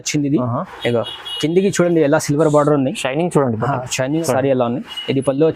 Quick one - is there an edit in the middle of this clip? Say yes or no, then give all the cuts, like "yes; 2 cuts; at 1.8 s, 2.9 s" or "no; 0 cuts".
yes; 1 cut; at 4.2 s